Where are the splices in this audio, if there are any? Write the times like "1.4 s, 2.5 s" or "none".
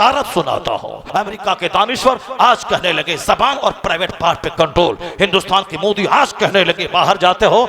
1.0 s